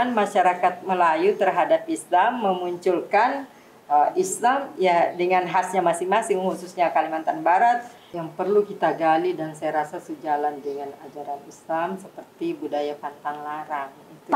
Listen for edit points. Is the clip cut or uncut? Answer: cut